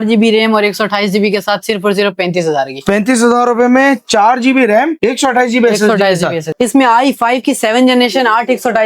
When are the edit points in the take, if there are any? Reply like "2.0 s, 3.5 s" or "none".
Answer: 6.4 s